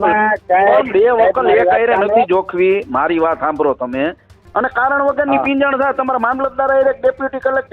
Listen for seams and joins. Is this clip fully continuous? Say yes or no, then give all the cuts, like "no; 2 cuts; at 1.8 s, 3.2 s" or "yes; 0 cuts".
no; 1 cut; at 4.4 s